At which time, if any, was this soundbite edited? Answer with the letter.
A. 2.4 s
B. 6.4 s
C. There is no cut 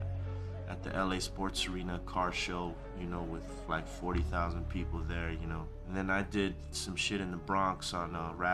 A